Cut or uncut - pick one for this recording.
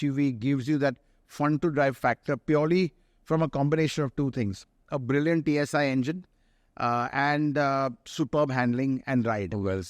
uncut